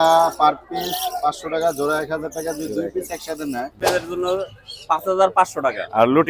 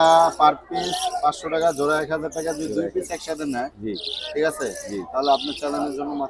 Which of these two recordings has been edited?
first; 1 cut; at 3.8 s

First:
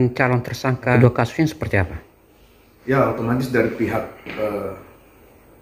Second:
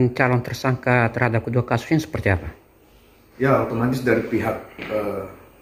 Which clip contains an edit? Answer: first; 1 cut; at 0.9 s

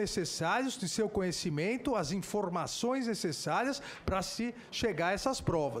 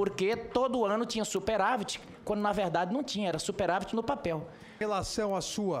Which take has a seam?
second; 1 cut; at 4.8 s

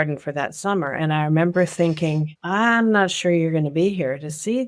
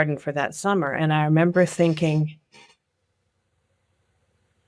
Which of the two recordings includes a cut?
first; 1 cut; at 2.3 s

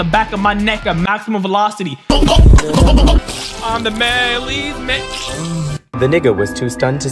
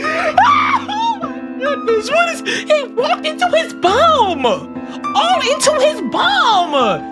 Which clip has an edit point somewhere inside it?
first; 2 cuts; at 3.3 s, 5.9 s

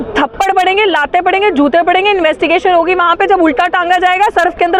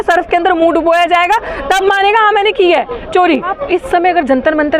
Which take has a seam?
second; 1 cut; at 3.5 s

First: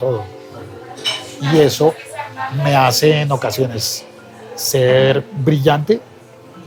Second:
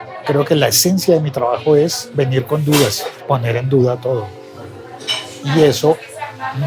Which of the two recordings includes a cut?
second; 1 cut; at 3.1 s

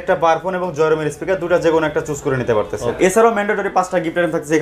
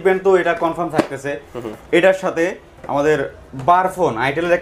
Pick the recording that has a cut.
first; 1 cut; at 3.0 s

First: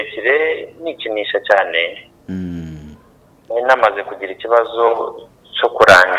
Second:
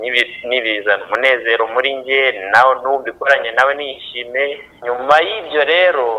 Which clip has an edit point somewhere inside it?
second; 1 cut; at 4.7 s

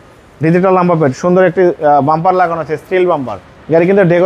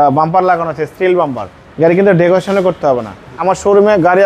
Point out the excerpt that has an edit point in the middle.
second; 1 cut; at 3.3 s

